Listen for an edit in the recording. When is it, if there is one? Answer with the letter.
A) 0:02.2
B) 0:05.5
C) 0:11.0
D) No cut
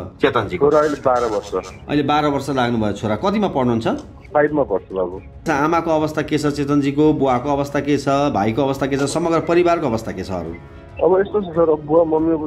B